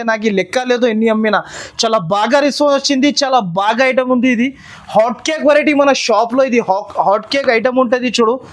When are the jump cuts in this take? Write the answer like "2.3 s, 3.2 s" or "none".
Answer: none